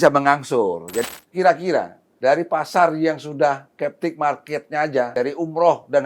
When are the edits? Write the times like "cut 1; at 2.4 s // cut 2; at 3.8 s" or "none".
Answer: cut 1; at 1.1 s // cut 2; at 2.0 s // cut 3; at 5.1 s